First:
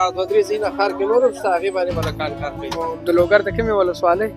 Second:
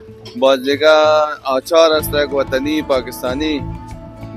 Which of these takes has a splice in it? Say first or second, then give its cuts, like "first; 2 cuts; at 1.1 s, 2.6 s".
first; 1 cut; at 2.9 s